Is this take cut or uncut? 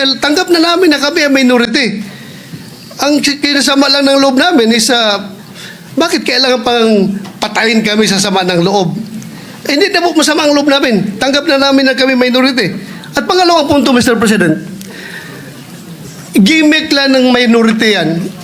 uncut